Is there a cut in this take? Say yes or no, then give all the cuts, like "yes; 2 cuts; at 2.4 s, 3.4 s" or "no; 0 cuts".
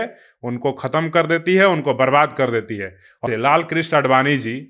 yes; 1 cut; at 3.2 s